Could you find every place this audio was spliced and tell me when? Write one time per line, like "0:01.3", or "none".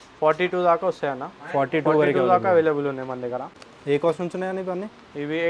0:03.6